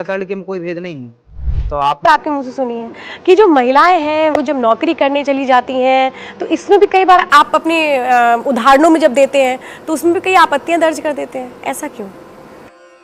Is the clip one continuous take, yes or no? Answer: no